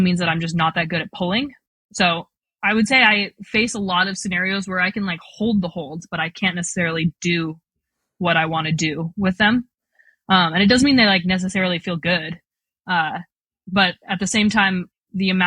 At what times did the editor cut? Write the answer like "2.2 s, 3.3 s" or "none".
none

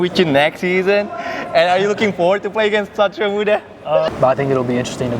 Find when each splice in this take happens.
4.1 s

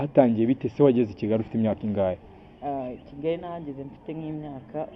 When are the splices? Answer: none

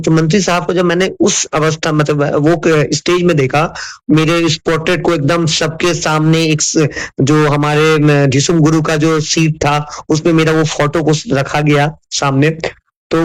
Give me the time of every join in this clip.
none

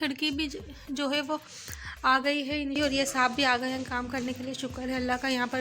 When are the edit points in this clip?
2.8 s

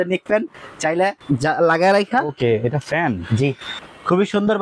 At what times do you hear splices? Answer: 1.2 s, 3.7 s

